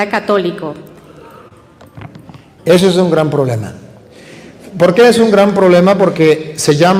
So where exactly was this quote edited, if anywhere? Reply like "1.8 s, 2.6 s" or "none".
none